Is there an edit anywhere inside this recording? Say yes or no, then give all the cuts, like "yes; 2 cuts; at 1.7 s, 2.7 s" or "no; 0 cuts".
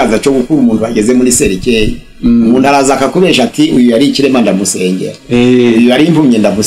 no; 0 cuts